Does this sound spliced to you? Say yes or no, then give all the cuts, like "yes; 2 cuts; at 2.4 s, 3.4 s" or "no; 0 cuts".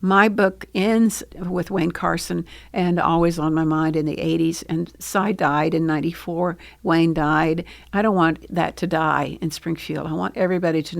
yes; 1 cut; at 1.3 s